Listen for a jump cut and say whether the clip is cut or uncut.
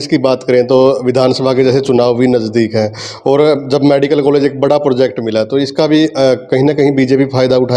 uncut